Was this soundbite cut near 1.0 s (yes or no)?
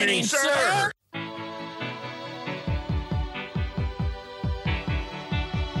yes